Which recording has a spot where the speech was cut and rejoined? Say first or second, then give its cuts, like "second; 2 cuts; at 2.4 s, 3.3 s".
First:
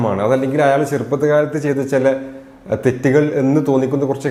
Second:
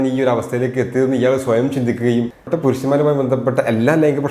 second; 1 cut; at 2.4 s